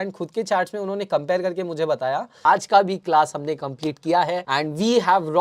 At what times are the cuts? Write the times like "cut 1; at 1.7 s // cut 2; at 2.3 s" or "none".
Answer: cut 1; at 2.3 s // cut 2; at 4.4 s